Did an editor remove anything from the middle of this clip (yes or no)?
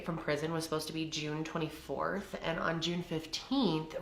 no